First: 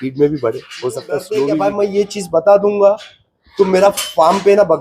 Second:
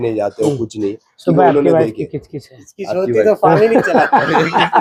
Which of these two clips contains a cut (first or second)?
first